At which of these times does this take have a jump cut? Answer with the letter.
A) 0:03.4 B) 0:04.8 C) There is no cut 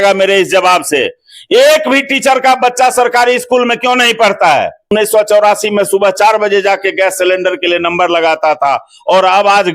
B